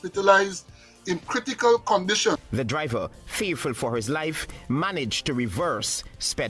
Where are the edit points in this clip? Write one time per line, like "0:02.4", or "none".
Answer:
0:02.5